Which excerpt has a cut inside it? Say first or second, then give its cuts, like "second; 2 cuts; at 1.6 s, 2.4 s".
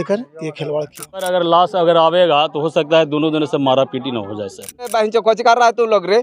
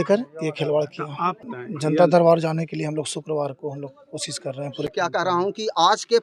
first; 2 cuts; at 1.3 s, 4.9 s